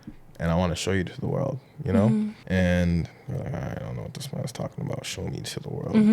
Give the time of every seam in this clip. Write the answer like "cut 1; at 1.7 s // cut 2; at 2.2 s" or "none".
cut 1; at 2.4 s